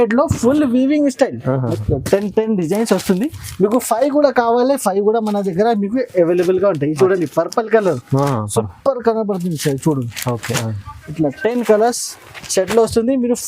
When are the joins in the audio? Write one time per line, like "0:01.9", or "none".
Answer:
0:01.8